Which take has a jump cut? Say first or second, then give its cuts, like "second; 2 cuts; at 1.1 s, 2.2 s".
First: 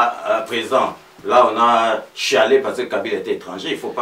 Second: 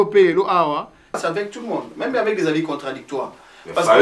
second; 1 cut; at 1.2 s